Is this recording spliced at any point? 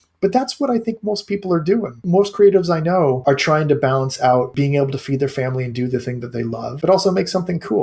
yes; 4 cuts; at 2.0 s, 3.2 s, 4.5 s, 6.7 s

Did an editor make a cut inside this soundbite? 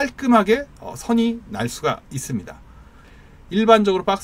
yes; 1 cut; at 3.0 s

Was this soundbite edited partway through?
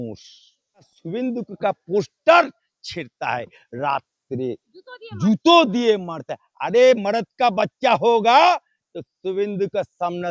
yes; 1 cut; at 1.0 s

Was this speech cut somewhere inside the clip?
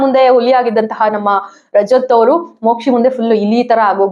no; 0 cuts

